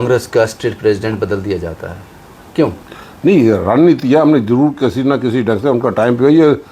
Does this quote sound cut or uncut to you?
uncut